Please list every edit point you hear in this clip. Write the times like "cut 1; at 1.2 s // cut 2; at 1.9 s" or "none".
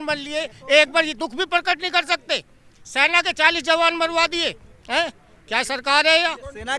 none